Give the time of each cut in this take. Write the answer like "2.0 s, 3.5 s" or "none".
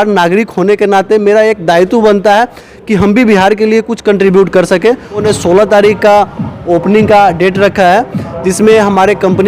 5.2 s